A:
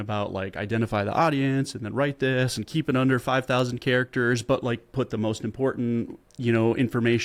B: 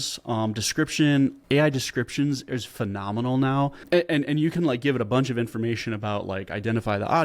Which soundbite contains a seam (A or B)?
B